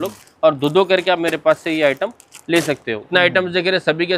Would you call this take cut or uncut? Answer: cut